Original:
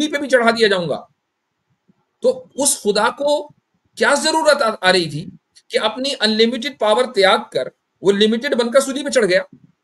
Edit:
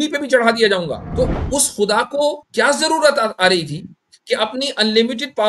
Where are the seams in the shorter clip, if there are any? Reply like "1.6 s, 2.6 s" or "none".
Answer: 1.0 s, 2.4 s